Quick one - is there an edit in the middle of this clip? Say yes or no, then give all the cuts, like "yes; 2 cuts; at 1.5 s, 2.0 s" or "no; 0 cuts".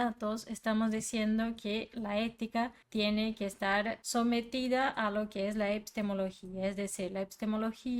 yes; 2 cuts; at 2.8 s, 4.0 s